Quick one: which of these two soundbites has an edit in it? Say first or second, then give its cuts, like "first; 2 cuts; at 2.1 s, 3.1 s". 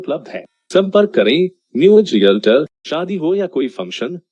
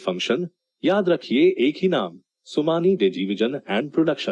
first; 1 cut; at 2.8 s